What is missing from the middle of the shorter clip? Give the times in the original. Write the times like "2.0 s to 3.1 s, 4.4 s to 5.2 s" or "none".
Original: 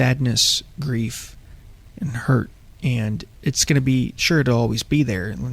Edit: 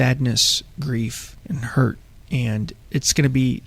1.3 s to 1.8 s